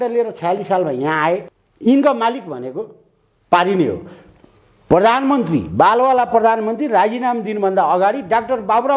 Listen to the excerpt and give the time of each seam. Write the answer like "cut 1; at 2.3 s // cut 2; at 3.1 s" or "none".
cut 1; at 1.6 s